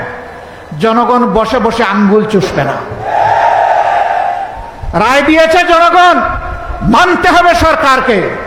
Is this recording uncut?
yes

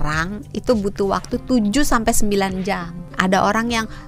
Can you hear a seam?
yes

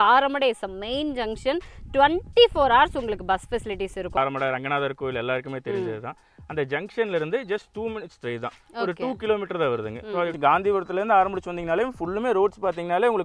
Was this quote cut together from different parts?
yes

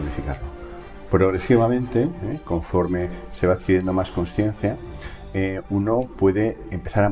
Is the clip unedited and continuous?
yes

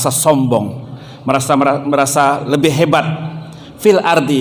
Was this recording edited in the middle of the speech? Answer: no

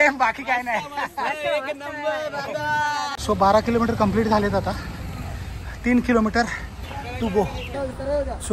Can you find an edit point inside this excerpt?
yes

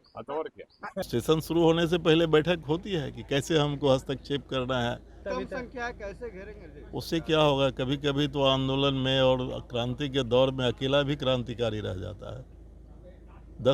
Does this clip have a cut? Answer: yes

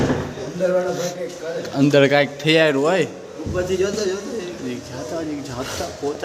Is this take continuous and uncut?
yes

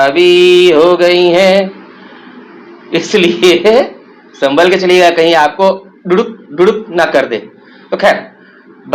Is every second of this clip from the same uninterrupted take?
yes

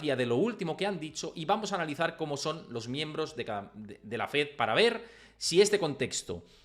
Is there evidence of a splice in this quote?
no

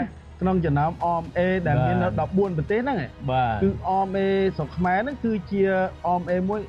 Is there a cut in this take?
no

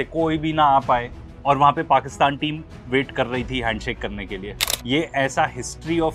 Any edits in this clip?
no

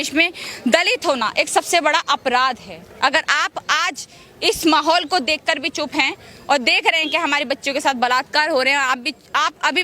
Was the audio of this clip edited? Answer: no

